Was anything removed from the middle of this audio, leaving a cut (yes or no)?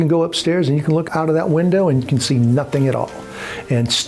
yes